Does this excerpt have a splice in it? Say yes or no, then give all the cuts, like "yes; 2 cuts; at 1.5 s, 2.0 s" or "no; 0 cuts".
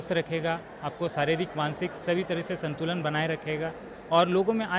no; 0 cuts